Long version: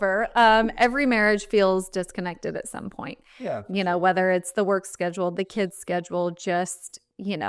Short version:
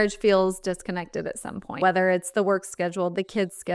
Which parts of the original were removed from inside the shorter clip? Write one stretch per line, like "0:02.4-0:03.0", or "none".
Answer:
0:03.1-0:04.0

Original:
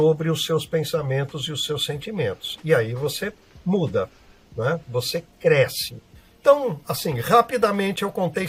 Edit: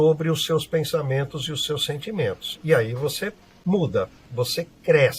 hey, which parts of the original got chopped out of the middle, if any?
0:04.3-0:04.8

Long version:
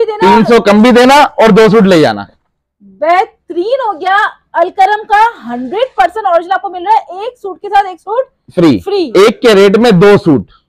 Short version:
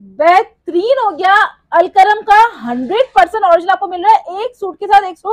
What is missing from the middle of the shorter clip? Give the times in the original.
none

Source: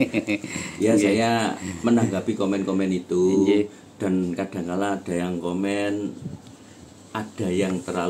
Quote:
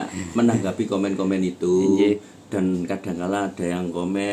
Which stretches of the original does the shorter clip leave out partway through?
none

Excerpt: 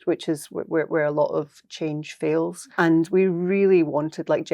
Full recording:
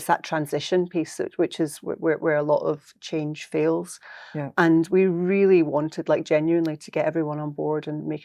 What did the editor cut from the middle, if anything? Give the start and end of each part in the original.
0:04.0-0:04.4

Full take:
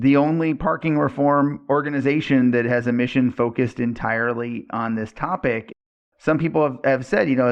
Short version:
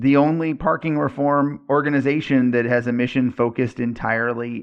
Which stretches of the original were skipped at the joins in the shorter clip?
none

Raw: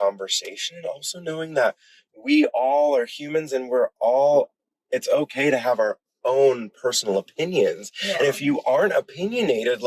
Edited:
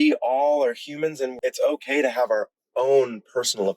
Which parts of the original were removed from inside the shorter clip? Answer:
0:03.6-0:04.7

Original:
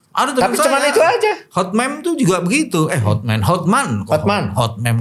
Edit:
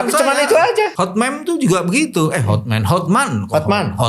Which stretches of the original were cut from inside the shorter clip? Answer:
0:01.4-0:01.5

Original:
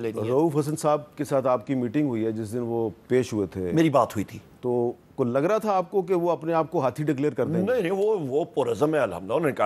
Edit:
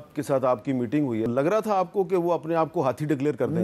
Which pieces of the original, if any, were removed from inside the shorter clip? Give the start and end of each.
0:02.3-0:05.2

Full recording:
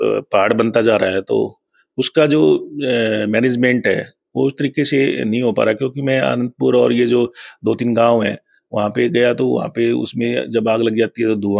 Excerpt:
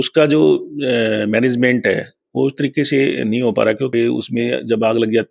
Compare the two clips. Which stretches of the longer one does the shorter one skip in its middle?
0:05.9-0:09.7

